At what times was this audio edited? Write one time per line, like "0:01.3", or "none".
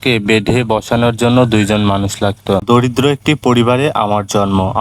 0:02.6